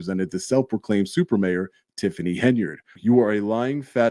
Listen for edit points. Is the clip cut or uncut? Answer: cut